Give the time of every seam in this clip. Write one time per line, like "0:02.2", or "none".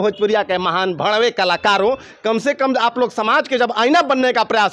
none